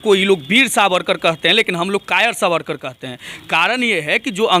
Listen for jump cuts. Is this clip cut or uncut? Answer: uncut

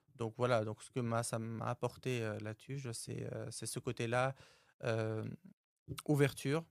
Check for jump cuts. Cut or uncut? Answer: uncut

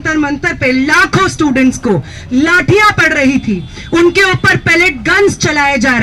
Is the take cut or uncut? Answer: uncut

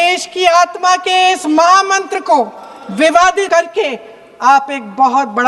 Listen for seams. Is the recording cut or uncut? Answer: cut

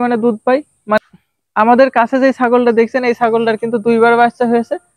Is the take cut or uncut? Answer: cut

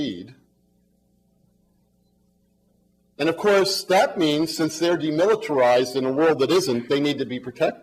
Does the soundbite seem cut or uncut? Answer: uncut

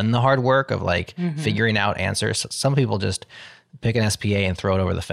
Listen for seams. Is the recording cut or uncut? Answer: uncut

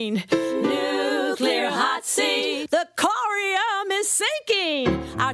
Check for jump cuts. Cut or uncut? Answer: uncut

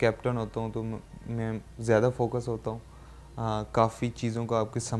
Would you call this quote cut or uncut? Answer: uncut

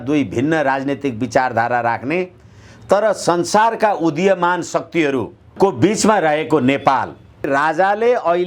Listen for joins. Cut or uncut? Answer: cut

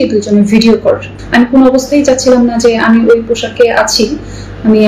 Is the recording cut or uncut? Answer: cut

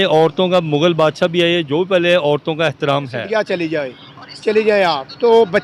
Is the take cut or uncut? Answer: cut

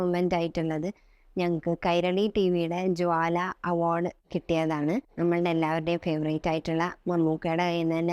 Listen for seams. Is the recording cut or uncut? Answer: cut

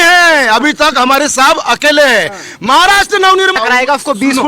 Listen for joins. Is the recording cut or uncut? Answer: cut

